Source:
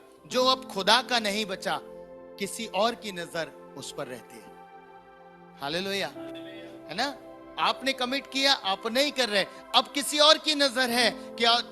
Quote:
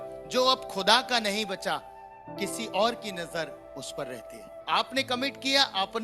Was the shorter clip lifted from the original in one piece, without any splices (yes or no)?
no